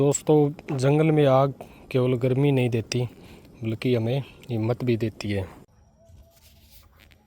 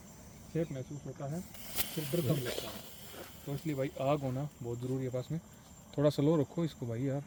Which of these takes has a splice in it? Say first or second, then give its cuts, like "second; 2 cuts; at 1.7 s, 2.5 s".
first; 1 cut; at 5.7 s